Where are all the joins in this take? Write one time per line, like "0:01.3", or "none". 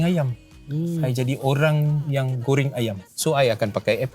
0:03.1